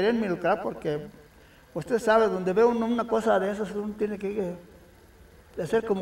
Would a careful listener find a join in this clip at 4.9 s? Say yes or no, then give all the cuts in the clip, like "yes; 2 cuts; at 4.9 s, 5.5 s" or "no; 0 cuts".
no; 0 cuts